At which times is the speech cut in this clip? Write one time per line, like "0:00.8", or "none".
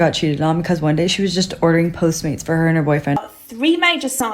0:03.2